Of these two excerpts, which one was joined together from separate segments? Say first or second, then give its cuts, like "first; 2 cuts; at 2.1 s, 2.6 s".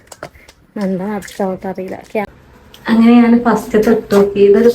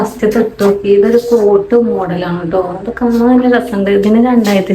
first; 1 cut; at 2.3 s